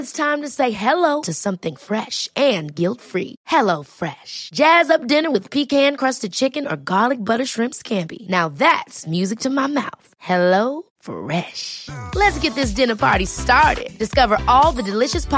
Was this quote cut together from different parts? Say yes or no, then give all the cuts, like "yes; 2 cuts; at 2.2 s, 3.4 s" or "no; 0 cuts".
no; 0 cuts